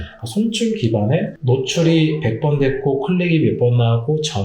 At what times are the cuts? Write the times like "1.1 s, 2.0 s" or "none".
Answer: 1.4 s